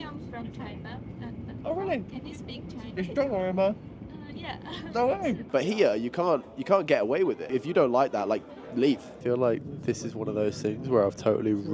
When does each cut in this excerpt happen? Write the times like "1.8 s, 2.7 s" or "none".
5.4 s, 7.4 s, 9.1 s